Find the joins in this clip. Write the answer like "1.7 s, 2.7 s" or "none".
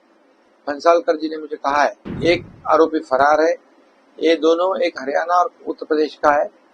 2.1 s